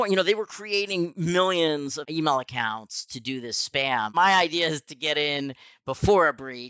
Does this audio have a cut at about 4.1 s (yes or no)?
yes